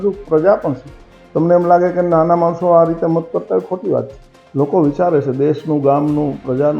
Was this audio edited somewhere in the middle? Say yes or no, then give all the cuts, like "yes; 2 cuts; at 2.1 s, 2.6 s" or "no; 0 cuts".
no; 0 cuts